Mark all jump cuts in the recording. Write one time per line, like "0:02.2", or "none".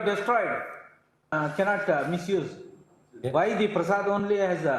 0:01.3